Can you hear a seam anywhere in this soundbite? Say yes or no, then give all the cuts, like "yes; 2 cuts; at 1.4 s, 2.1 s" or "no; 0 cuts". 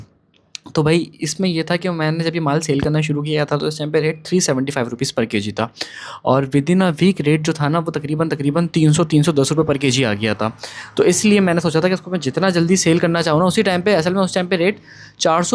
no; 0 cuts